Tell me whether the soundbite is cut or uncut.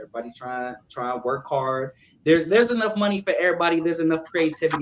uncut